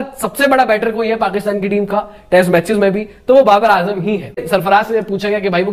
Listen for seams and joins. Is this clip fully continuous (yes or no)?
no